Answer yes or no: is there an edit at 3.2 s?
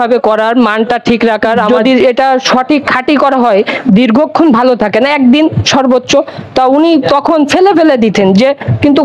no